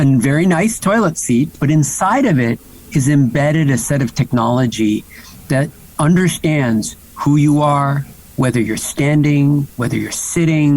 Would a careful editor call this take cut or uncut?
cut